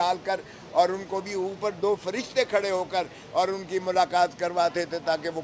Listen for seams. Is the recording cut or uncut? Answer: uncut